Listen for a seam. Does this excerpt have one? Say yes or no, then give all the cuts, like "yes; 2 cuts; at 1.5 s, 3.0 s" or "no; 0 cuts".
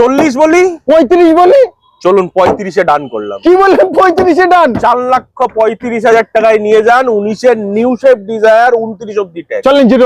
no; 0 cuts